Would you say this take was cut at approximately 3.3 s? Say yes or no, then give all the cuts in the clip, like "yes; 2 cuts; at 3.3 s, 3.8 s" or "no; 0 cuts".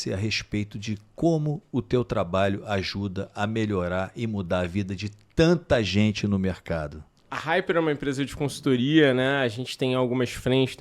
no; 1 cut; at 7.2 s